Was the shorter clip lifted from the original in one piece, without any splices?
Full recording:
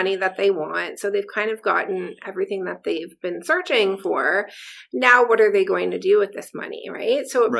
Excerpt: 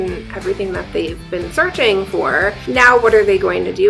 no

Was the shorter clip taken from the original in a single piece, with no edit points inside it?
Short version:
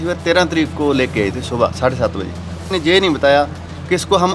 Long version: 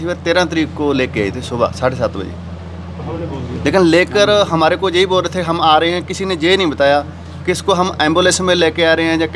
no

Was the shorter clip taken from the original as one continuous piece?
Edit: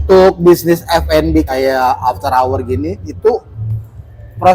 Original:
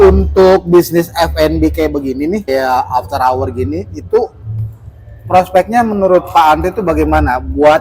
no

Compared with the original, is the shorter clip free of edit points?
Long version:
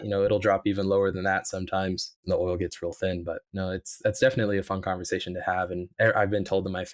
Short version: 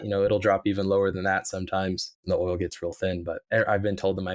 no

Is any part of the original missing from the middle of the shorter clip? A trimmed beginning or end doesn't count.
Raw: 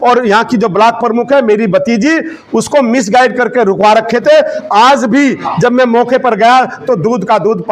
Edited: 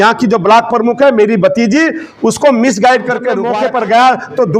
yes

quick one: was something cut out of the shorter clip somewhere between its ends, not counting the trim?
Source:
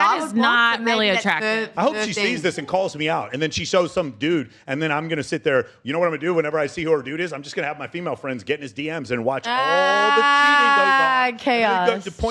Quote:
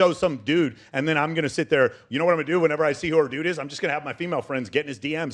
no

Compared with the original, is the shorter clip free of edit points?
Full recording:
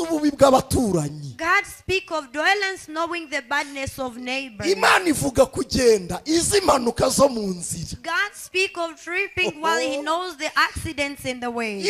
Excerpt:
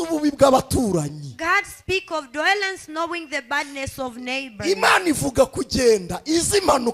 yes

